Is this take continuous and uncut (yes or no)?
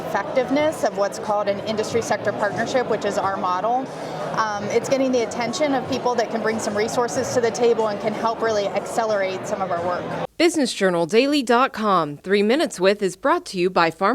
no